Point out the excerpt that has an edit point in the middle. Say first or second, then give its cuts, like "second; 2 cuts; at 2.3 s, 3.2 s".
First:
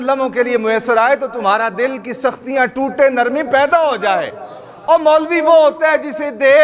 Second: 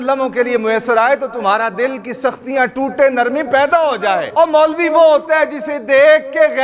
second; 1 cut; at 4.3 s